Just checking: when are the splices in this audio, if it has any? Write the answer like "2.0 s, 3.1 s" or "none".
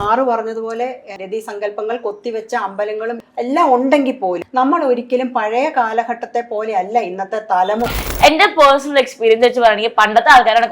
3.2 s, 4.4 s, 7.8 s